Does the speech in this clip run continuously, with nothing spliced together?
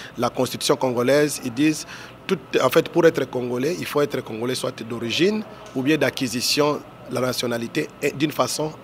yes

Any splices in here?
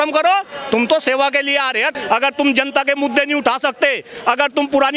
yes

